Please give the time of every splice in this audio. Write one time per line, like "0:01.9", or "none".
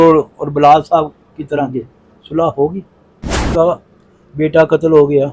0:03.5